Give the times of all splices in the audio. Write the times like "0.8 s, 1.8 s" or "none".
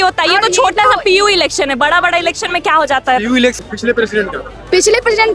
3.5 s